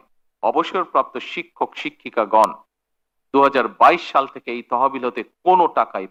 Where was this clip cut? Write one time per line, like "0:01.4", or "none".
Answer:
none